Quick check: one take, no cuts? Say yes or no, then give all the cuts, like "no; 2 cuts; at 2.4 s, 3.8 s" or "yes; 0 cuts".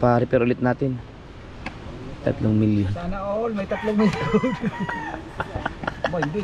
yes; 0 cuts